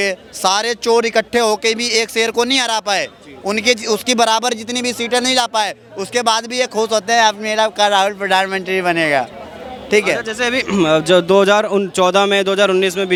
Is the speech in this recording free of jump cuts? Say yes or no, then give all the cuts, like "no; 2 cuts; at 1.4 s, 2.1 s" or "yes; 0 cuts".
yes; 0 cuts